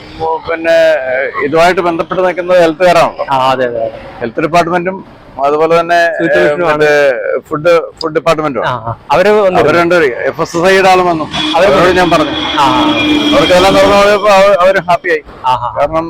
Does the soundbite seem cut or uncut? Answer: uncut